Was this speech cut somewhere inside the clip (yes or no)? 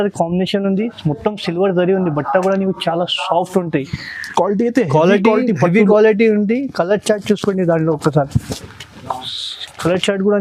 no